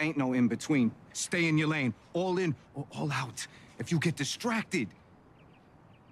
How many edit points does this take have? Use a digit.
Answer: 0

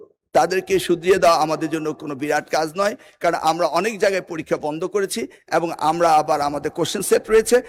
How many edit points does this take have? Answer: 0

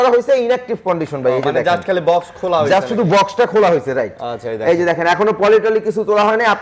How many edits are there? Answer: 0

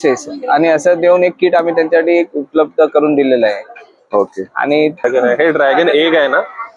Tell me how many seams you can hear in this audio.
1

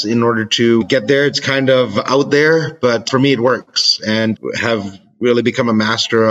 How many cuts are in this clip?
3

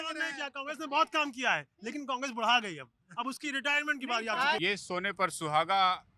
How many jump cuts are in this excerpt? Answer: 1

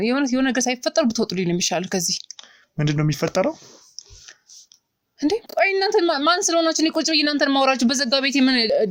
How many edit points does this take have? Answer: 0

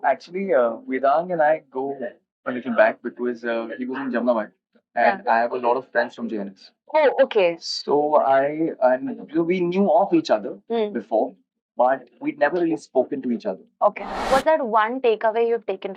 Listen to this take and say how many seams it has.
1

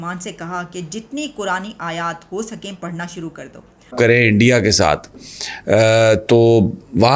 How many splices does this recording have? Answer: 1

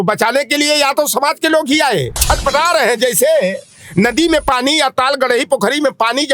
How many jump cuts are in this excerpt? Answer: 1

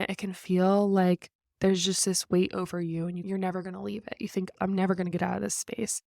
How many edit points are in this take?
2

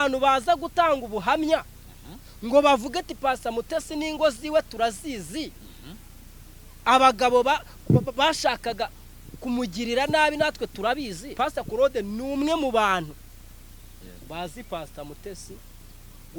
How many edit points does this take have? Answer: 1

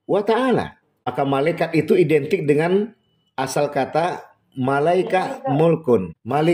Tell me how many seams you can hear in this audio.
1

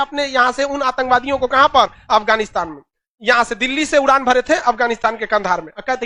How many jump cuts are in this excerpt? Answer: 0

